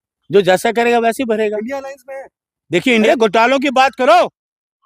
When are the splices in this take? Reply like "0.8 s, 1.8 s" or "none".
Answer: 3.1 s